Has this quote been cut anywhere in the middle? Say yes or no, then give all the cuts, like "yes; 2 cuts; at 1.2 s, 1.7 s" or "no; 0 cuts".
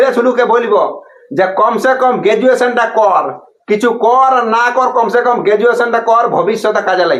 no; 0 cuts